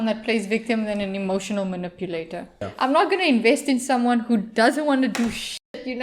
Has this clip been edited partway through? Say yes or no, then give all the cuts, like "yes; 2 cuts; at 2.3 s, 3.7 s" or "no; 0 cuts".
yes; 1 cut; at 2.6 s